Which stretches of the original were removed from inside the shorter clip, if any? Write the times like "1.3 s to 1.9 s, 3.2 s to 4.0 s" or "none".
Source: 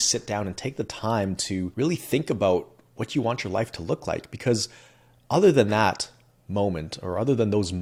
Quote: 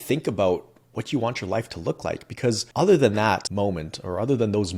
4.7 s to 5.2 s, 6.0 s to 6.5 s